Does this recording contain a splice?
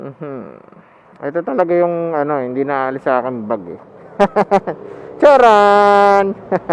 yes; 1 cut; at 5.6 s

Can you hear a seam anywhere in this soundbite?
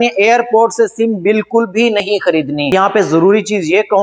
yes; 1 cut; at 2.7 s

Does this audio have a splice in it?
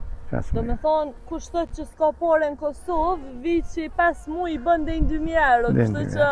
no; 0 cuts

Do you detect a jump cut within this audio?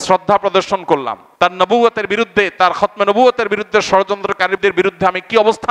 yes; 2 cuts; at 1.2 s, 4.6 s

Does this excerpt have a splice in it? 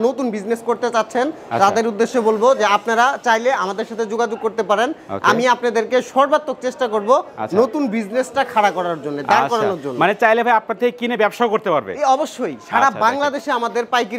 no; 0 cuts

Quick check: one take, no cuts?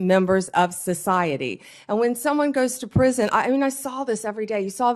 yes; 0 cuts

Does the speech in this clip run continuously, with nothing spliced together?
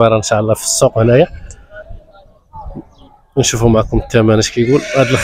yes; 0 cuts

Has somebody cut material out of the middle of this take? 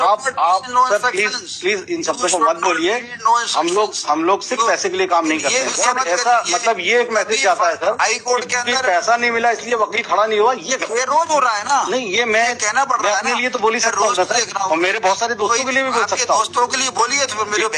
yes; 1 cut; at 5.5 s

